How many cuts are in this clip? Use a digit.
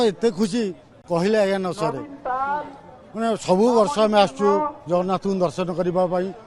0